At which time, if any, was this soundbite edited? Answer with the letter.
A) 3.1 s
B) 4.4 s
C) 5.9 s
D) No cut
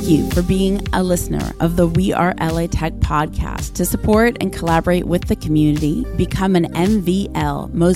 D